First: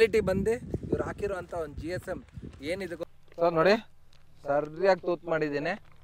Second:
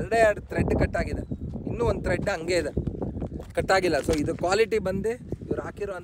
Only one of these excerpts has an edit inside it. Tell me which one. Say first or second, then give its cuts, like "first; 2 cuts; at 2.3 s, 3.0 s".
first; 1 cut; at 3.0 s